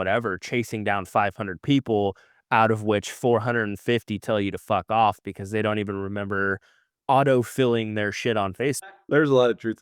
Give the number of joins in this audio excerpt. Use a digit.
1